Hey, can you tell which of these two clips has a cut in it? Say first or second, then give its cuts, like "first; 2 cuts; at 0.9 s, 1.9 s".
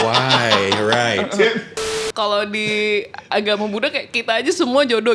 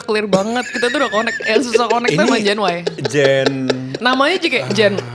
first; 1 cut; at 1.9 s